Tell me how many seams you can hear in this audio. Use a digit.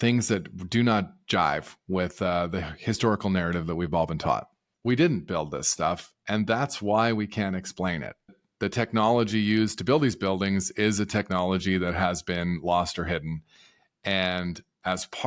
2